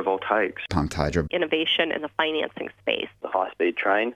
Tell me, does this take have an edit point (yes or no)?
yes